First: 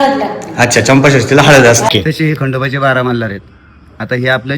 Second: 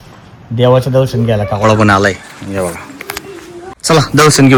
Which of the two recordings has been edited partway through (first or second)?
first